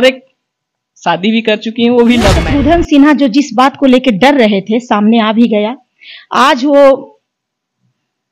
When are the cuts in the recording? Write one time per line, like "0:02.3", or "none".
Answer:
0:02.4

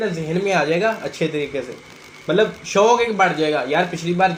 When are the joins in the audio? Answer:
none

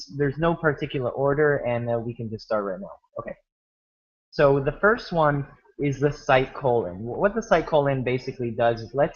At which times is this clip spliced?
0:05.6

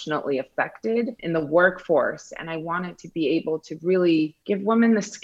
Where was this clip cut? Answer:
0:01.2
0:04.4

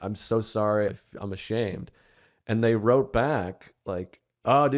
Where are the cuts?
0:00.9

